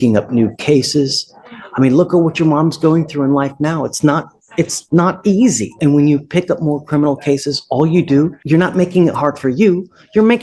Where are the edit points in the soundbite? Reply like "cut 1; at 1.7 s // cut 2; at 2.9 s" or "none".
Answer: cut 1; at 5.7 s // cut 2; at 8.4 s